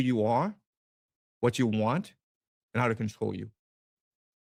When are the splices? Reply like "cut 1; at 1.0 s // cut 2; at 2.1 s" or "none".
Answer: none